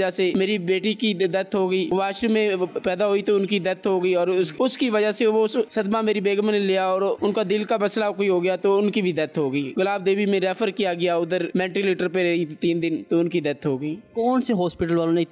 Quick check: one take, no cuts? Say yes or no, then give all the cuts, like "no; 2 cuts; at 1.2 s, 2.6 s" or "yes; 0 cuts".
yes; 0 cuts